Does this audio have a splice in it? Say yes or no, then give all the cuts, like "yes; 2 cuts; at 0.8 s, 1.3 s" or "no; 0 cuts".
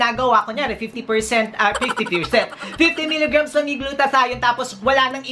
no; 0 cuts